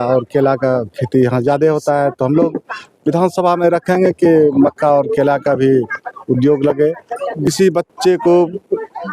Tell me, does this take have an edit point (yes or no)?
yes